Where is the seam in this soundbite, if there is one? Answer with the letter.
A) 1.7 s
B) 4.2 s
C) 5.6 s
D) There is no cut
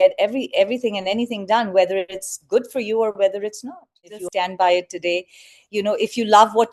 B